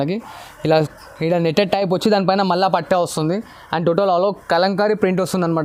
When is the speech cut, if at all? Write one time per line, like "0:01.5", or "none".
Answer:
none

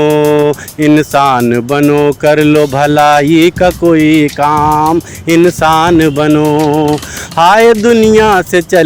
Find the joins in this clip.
none

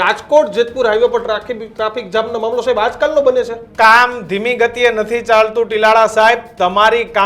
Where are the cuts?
0:03.7

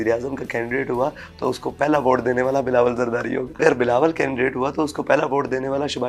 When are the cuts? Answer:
0:03.6

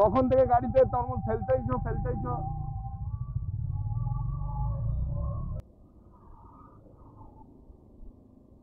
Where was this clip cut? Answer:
0:05.6

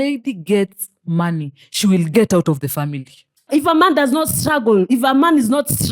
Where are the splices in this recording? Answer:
0:03.5

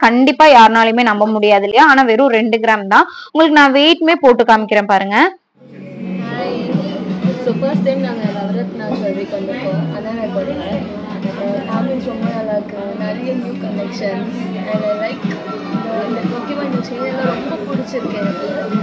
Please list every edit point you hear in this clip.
none

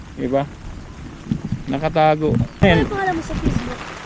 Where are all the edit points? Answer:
0:02.6

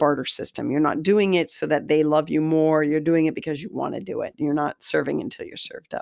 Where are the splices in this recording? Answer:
0:04.3

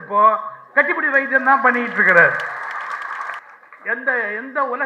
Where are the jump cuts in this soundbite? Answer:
0:03.4

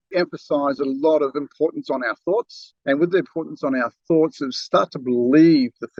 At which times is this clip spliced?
none

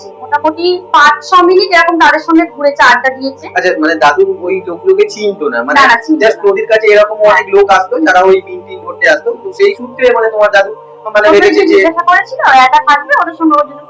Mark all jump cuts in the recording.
none

